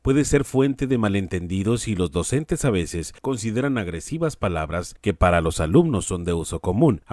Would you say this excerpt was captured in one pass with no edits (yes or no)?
no